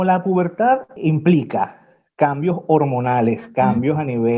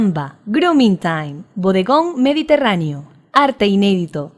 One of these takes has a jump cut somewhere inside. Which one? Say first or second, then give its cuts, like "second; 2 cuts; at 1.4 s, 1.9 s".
first; 1 cut; at 0.9 s